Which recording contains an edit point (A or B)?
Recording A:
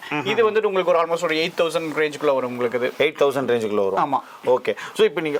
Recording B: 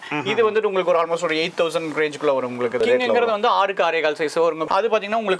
B